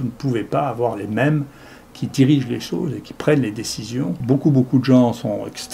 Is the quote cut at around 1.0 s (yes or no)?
no